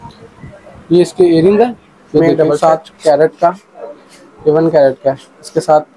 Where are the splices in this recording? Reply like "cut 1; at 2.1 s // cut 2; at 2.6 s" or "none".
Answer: cut 1; at 2.9 s